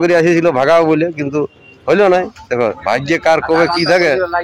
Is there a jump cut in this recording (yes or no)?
no